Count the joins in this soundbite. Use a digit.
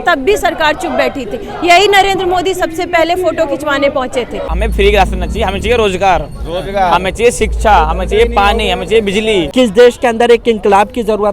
2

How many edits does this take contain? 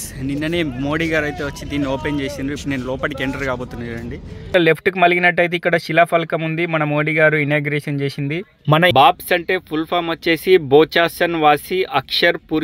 2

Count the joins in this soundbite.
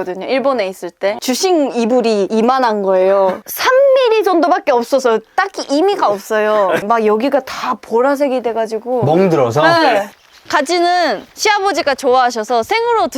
4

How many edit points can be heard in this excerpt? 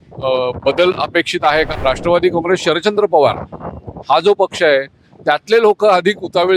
1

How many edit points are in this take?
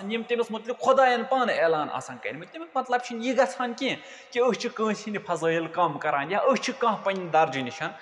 0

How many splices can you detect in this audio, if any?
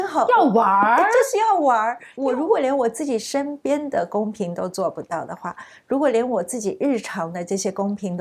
1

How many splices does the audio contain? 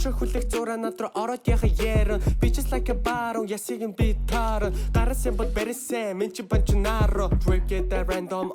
1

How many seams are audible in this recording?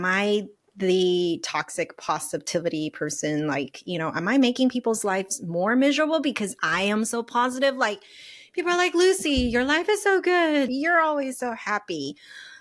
1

